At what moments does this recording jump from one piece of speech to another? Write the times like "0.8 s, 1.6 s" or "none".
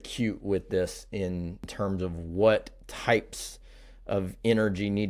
none